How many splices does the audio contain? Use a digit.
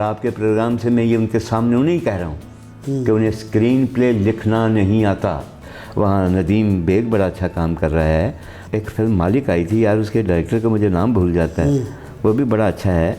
2